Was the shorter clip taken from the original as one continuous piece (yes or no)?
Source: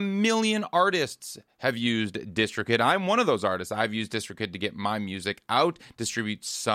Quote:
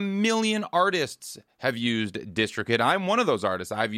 yes